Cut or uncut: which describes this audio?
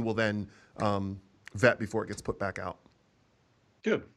uncut